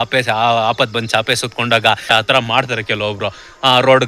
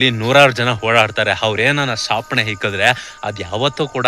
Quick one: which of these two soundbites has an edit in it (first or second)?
first